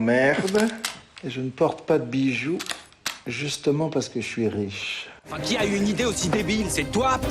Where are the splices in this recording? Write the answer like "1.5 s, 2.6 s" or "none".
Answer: 5.4 s